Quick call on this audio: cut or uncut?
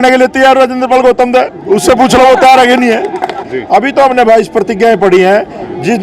cut